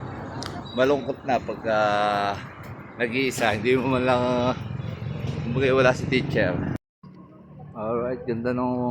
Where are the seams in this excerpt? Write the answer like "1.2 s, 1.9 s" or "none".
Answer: 6.8 s

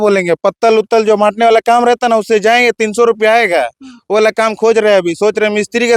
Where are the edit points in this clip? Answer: none

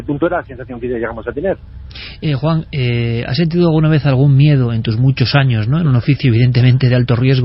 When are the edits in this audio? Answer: none

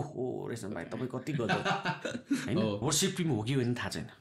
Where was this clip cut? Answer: 2.8 s

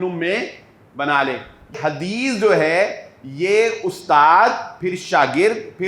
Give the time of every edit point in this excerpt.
1.8 s

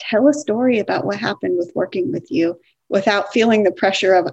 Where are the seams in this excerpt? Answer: none

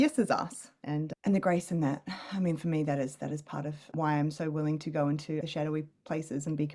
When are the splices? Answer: 5.5 s

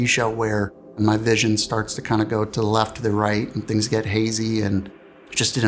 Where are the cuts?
0.9 s

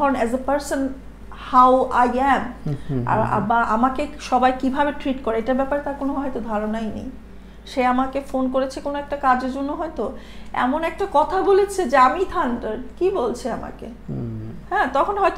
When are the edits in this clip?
none

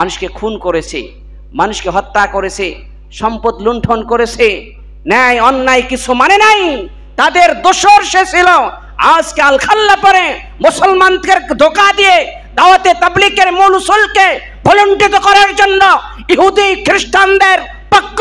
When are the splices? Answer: none

